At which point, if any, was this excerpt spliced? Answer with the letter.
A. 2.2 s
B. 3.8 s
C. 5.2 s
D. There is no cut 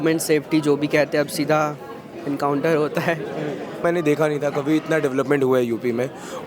B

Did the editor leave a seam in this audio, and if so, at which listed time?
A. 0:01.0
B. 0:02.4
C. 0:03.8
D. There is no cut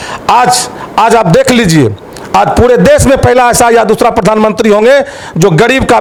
D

